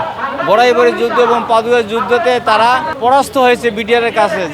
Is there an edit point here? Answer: yes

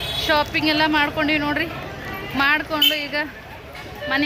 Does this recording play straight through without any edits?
yes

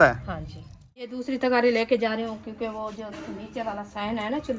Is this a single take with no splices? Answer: no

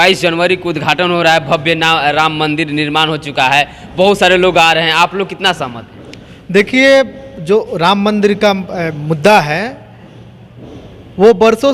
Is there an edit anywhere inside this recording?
no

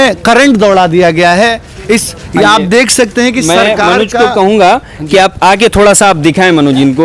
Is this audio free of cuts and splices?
yes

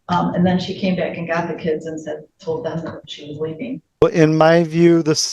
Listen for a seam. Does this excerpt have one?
yes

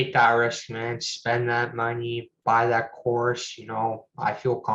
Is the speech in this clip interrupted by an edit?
no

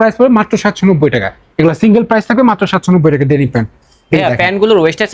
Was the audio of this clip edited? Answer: no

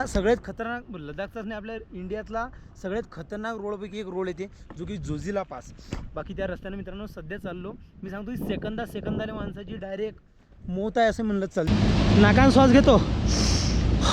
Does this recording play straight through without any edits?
no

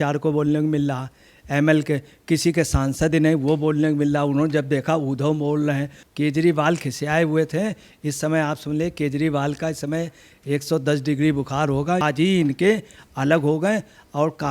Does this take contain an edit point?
yes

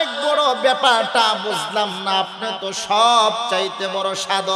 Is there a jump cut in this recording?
no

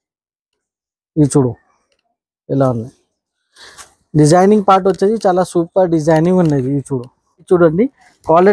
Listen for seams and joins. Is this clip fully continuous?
no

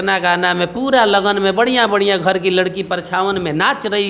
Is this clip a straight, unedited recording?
yes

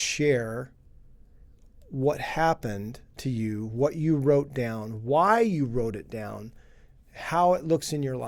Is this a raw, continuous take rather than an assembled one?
yes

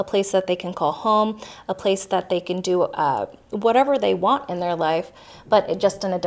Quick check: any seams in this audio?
no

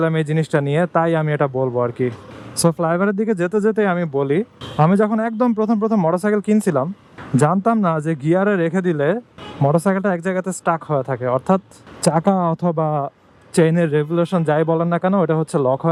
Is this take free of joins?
yes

